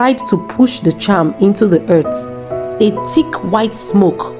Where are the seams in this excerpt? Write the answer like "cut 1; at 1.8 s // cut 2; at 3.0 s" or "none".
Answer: cut 1; at 2.2 s